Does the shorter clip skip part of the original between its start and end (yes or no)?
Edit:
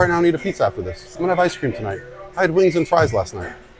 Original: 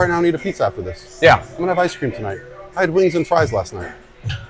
yes